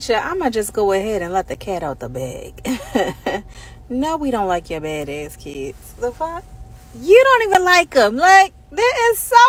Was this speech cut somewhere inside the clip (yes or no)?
no